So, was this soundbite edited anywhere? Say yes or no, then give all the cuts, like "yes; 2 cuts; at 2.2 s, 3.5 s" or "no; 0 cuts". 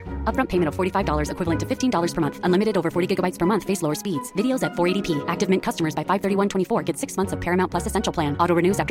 no; 0 cuts